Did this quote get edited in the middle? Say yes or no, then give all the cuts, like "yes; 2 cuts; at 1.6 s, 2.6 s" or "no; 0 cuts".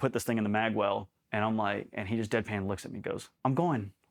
yes; 2 cuts; at 1.2 s, 3.3 s